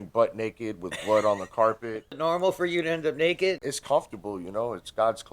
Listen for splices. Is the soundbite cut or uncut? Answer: cut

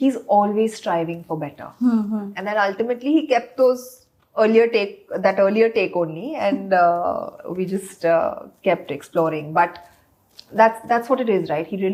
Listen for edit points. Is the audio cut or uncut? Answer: uncut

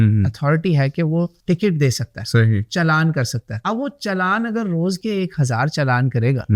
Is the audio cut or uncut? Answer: uncut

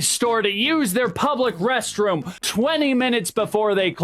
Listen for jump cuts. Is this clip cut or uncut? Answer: cut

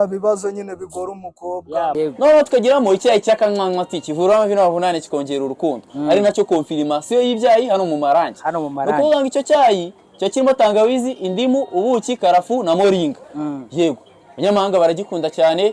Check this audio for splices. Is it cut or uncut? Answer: cut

